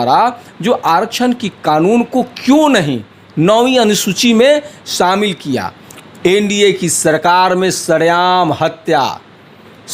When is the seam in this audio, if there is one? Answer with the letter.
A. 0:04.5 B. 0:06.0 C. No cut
B